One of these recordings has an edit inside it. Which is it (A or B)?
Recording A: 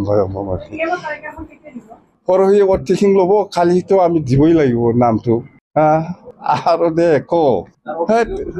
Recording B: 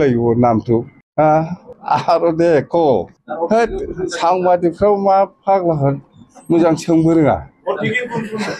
A